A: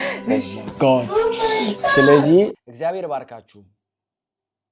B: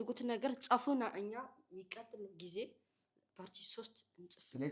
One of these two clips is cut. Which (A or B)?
A